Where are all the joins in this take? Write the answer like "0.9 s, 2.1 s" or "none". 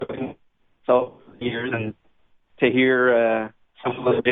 none

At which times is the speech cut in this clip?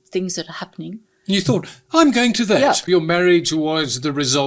2.8 s

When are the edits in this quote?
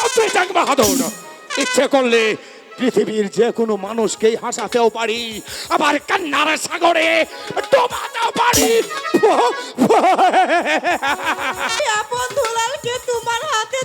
11.8 s

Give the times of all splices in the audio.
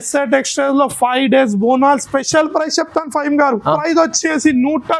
3.8 s

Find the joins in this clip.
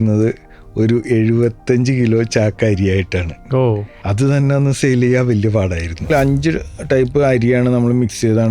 3.9 s, 6.1 s

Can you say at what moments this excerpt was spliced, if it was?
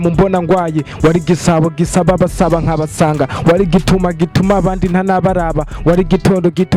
none

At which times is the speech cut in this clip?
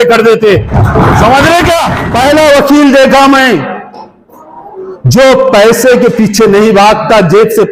2.0 s

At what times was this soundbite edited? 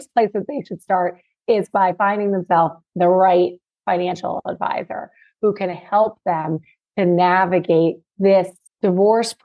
2.8 s, 8.2 s

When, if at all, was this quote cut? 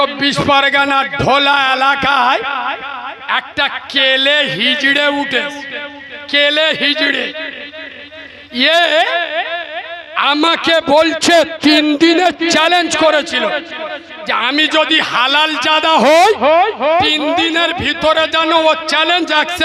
none

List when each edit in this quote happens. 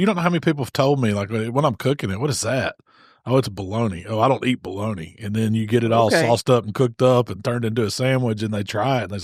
none

